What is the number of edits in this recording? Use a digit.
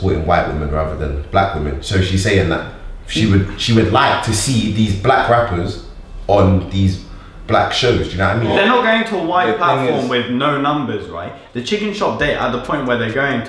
1